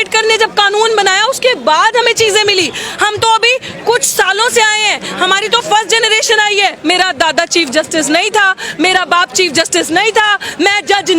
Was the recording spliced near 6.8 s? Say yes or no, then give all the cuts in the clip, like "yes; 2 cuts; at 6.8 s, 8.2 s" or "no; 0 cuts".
yes; 1 cut; at 6.8 s